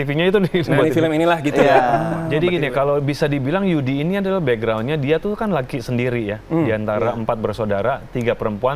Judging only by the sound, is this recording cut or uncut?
cut